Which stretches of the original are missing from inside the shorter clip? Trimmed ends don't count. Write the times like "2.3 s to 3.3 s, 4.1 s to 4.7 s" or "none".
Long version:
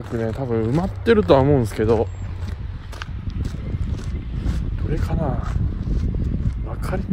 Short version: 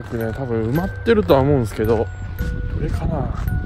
2.4 s to 4.5 s